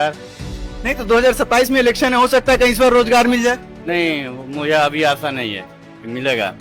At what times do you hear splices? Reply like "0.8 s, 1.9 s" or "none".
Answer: none